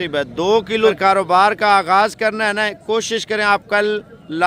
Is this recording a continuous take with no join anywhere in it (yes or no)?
no